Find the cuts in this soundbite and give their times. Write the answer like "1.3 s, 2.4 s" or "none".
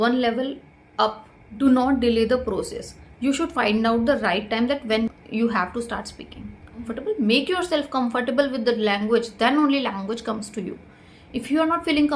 1.6 s, 5.1 s, 6.9 s

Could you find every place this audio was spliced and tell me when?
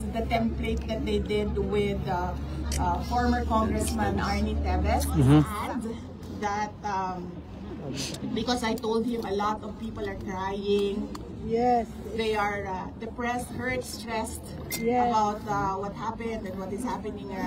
5.5 s

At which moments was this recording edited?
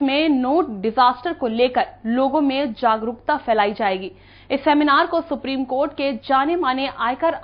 none

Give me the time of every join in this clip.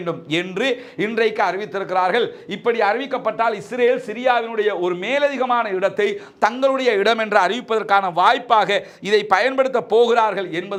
none

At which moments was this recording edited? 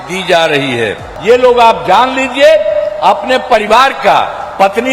1.1 s

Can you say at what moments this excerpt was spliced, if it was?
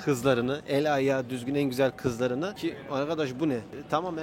2.6 s

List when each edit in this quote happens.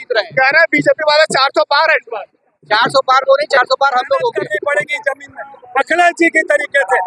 4.5 s

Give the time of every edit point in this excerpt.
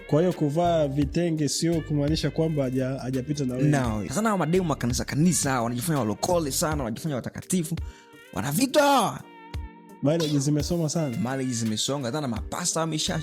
4.0 s

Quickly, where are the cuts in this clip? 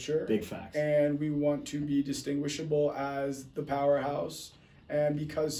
none

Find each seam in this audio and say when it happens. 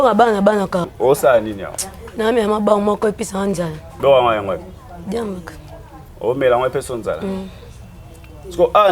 0.9 s

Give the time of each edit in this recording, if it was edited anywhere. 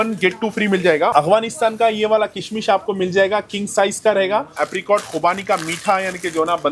1.1 s, 4.6 s

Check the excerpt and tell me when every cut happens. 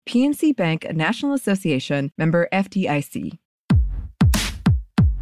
3.8 s

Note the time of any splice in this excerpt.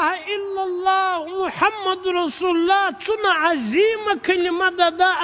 none

